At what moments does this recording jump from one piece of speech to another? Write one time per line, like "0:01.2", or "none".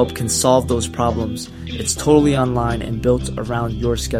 none